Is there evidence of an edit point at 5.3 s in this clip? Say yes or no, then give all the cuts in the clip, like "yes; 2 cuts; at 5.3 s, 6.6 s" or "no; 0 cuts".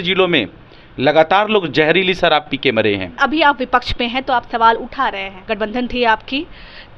yes; 2 cuts; at 3.2 s, 5.3 s